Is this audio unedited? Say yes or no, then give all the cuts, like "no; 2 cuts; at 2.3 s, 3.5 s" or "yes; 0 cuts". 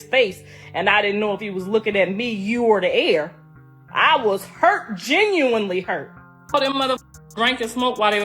no; 1 cut; at 6.3 s